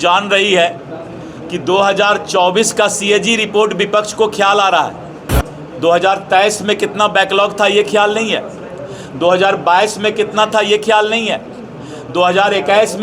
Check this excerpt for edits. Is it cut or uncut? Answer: uncut